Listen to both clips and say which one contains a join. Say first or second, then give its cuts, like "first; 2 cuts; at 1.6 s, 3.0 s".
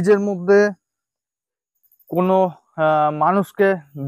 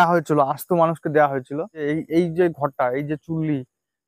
second; 1 cut; at 1.8 s